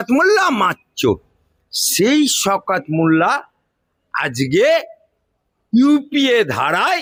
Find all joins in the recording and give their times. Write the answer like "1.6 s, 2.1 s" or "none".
none